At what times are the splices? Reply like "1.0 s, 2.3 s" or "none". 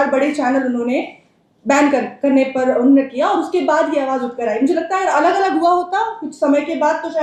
none